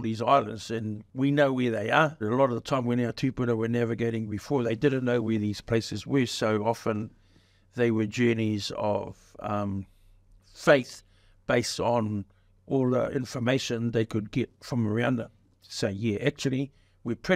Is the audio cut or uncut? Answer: cut